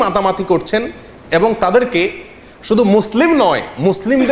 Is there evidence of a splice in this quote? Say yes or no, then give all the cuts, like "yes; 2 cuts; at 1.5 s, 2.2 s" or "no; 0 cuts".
no; 0 cuts